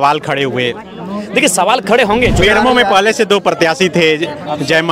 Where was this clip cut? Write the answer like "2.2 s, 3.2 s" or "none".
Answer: 2.4 s